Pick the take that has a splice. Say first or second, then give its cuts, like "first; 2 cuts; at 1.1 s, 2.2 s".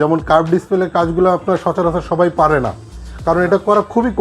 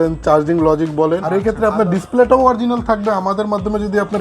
second; 1 cut; at 1.2 s